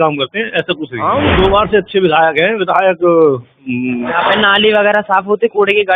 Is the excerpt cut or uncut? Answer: cut